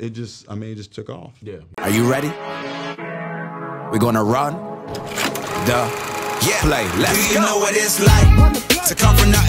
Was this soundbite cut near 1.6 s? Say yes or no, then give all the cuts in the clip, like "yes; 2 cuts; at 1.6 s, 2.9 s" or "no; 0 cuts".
yes; 1 cut; at 1.6 s